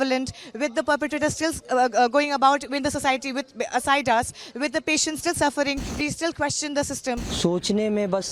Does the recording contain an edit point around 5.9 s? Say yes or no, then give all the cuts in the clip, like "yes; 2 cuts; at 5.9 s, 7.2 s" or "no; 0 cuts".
yes; 2 cuts; at 5.9 s, 7.3 s